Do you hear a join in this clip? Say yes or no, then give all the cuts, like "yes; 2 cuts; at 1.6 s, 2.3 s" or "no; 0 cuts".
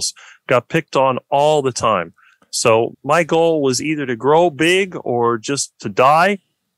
no; 0 cuts